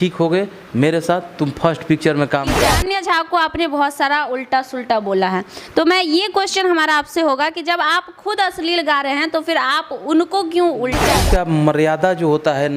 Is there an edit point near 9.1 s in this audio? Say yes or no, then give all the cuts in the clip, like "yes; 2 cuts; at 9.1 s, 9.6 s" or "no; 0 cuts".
no; 2 cuts; at 2.7 s, 11.1 s